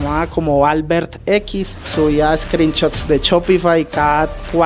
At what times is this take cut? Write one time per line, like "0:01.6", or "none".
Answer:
0:01.9